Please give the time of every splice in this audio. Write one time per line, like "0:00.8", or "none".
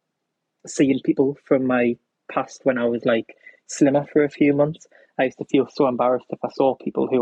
none